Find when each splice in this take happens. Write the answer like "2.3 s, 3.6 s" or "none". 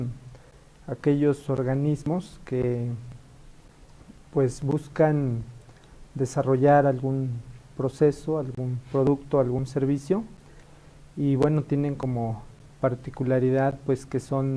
5.3 s